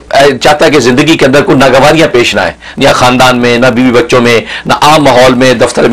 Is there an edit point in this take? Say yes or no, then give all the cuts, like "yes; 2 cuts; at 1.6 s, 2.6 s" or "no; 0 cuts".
no; 0 cuts